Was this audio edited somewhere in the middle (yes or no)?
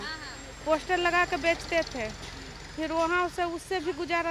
no